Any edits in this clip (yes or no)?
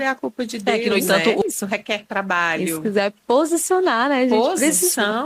yes